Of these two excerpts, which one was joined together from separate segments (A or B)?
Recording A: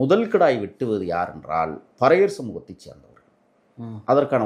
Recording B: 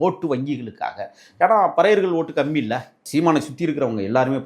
B